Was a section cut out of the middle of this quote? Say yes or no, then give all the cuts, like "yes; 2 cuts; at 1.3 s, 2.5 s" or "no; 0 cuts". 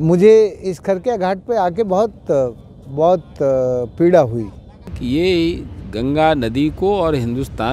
yes; 1 cut; at 4.9 s